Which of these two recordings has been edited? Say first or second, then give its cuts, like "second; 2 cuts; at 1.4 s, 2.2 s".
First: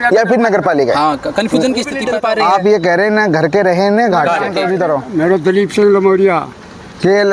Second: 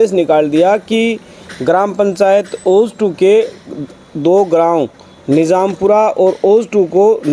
first; 2 cuts; at 2.0 s, 4.5 s